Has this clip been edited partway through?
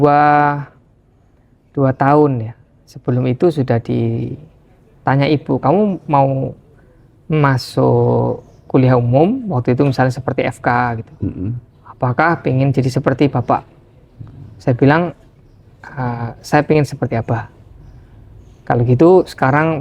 no; 0 cuts

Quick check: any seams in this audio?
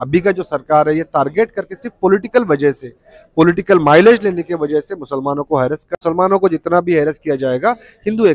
yes; 1 cut; at 5.9 s

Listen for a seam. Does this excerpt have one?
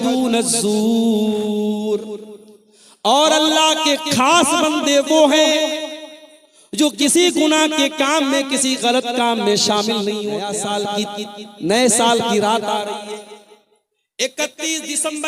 yes; 1 cut; at 10.8 s

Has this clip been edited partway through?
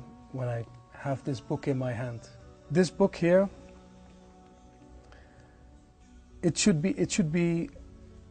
no; 0 cuts

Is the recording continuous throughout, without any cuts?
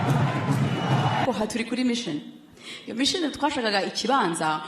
no; 1 cut; at 1.2 s

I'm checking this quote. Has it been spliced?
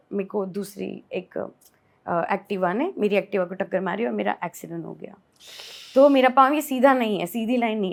no; 0 cuts

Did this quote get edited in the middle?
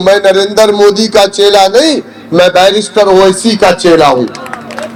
no; 0 cuts

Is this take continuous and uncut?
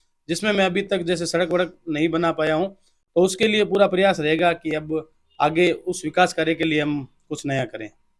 yes; 0 cuts

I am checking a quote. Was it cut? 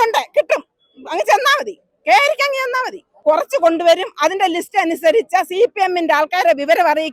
yes; 1 cut; at 3.1 s

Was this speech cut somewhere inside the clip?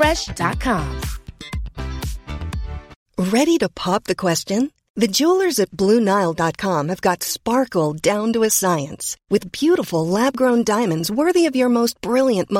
yes; 1 cut; at 3.0 s

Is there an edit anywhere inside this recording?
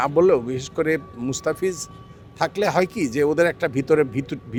no; 0 cuts

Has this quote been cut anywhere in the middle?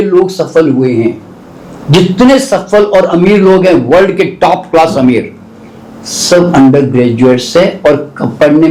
no; 0 cuts

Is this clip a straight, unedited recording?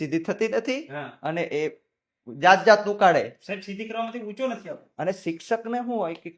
yes; 0 cuts

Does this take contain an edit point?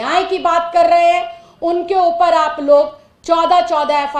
no; 0 cuts

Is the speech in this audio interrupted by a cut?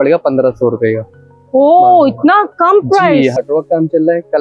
yes; 1 cut; at 3.3 s

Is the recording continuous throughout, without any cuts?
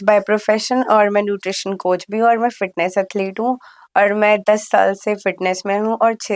yes; 0 cuts

